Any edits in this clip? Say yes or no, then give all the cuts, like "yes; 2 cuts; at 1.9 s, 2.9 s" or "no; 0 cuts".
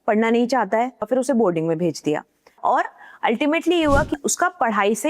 yes; 3 cuts; at 1.1 s, 2.6 s, 4.1 s